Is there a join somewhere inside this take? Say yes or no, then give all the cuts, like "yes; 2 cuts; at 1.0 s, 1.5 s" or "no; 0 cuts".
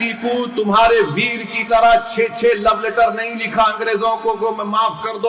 no; 0 cuts